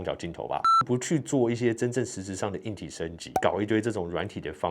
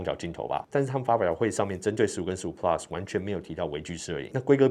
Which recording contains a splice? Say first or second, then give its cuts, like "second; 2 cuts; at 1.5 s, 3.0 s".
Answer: first; 2 cuts; at 0.8 s, 3.3 s